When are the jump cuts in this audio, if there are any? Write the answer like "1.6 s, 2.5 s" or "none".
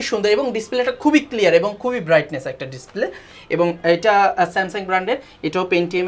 none